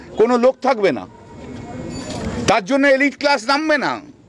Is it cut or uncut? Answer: cut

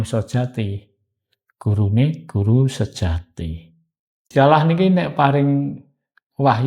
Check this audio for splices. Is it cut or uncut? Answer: cut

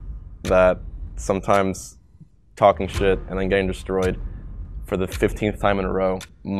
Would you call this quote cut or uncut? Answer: uncut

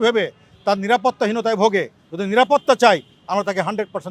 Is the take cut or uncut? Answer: uncut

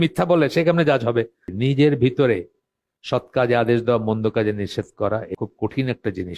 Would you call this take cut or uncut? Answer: cut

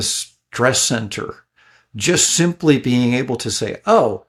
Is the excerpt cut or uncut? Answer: uncut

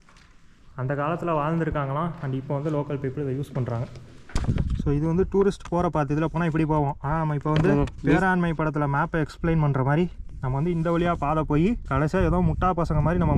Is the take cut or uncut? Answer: cut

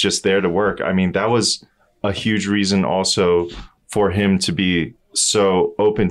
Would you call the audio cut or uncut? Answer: uncut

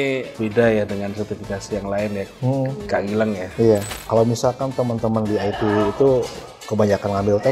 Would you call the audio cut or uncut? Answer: cut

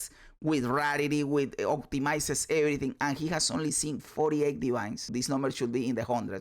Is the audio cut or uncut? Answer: cut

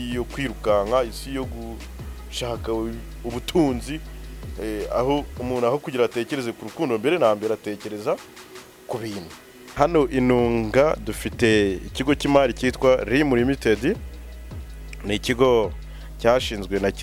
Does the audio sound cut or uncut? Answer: cut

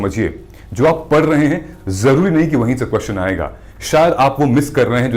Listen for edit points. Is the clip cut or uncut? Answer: uncut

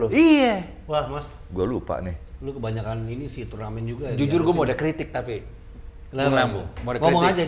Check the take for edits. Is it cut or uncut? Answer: uncut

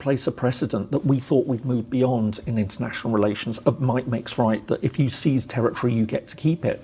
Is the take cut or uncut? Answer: uncut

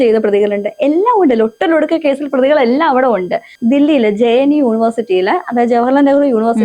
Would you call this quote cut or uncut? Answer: cut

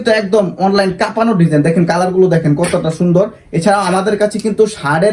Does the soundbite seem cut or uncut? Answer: uncut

